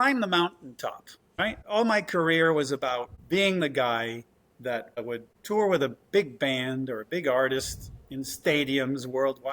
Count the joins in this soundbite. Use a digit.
3